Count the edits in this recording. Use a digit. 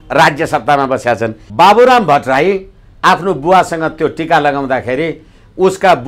1